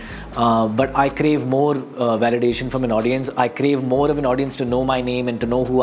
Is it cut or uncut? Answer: uncut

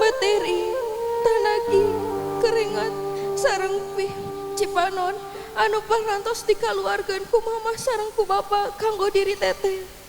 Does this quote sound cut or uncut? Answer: uncut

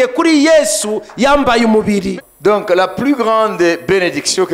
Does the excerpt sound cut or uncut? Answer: cut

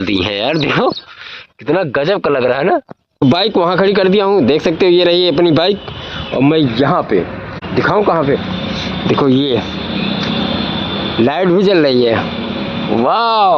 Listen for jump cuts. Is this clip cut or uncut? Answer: cut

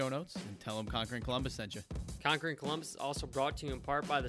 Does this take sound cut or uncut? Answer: cut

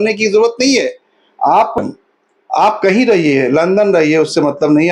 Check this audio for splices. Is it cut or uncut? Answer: cut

